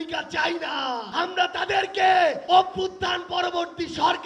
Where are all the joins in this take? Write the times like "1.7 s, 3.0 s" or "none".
1.1 s, 2.4 s